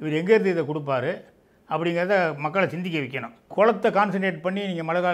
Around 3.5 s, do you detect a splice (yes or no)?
yes